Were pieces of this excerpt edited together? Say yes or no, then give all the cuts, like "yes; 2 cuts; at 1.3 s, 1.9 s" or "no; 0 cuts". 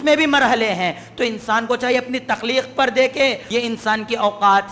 yes; 1 cut; at 3.4 s